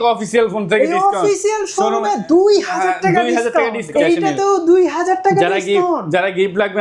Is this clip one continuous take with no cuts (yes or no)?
no